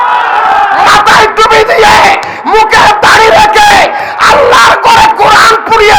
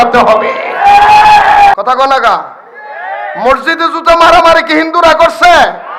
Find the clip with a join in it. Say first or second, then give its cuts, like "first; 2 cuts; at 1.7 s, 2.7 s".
second; 1 cut; at 1.7 s